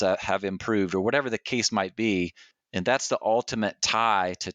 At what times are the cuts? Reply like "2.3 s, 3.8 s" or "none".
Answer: none